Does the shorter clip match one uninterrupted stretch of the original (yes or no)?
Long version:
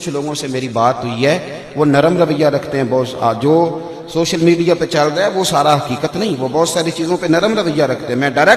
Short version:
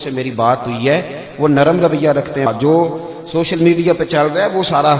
no